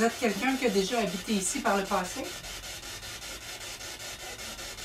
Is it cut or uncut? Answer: uncut